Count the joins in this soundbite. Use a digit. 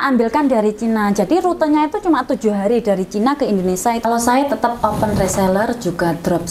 1